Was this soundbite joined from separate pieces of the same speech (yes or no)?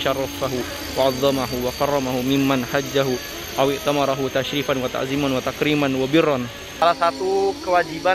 yes